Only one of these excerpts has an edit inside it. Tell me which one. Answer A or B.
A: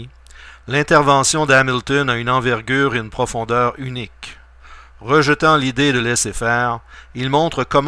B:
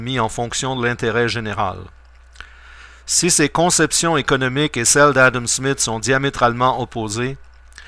A